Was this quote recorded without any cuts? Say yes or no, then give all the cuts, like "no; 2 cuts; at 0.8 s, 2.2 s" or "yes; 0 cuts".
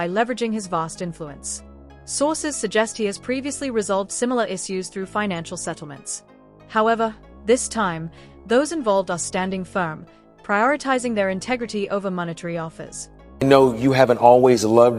no; 1 cut; at 13.2 s